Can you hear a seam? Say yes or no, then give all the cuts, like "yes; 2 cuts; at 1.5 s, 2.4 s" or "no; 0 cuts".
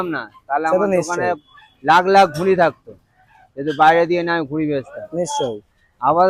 no; 0 cuts